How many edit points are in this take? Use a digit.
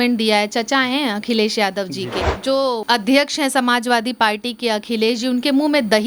1